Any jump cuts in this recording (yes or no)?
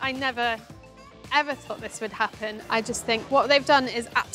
yes